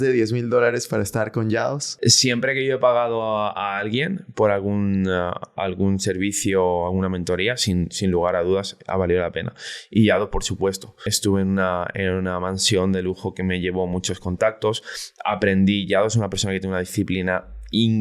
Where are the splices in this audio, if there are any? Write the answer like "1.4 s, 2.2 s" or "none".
1.9 s, 11.0 s